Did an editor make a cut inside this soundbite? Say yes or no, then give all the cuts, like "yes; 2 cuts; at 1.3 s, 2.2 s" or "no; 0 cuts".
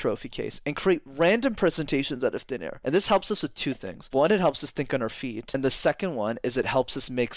yes; 3 cuts; at 2.7 s, 3.9 s, 5.4 s